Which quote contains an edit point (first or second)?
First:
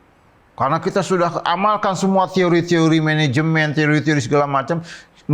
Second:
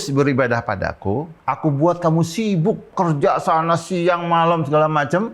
second